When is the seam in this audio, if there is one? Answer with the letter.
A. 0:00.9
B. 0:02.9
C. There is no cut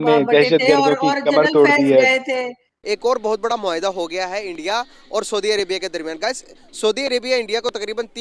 B